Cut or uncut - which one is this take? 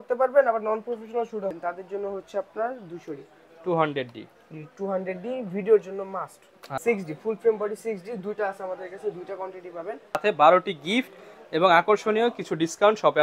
cut